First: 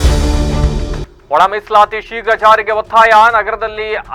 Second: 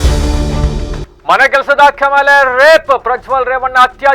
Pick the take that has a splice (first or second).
second